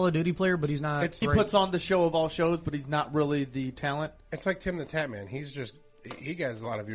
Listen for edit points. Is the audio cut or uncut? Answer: cut